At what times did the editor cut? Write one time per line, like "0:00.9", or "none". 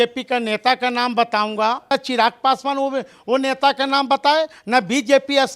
0:01.9